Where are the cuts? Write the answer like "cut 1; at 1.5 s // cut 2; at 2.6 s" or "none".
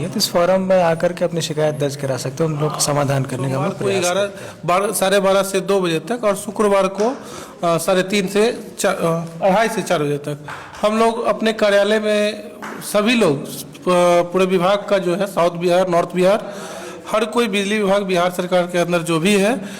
cut 1; at 3.8 s